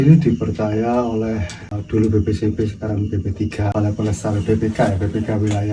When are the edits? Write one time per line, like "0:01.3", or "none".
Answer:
0:01.8
0:03.7